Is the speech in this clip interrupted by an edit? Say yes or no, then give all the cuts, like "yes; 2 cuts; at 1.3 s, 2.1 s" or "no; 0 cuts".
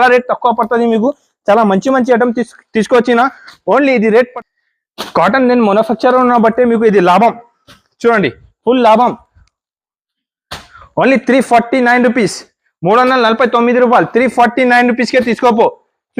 yes; 1 cut; at 4.3 s